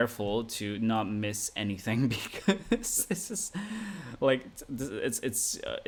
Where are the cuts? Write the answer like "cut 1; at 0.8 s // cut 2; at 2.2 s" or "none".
none